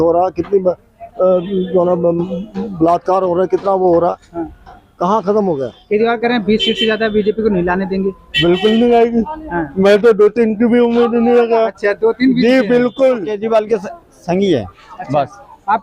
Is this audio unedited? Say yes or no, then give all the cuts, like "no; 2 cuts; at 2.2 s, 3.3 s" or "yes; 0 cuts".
no; 2 cuts; at 5.7 s, 13.3 s